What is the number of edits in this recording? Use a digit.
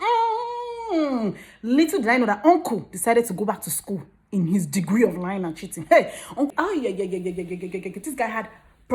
1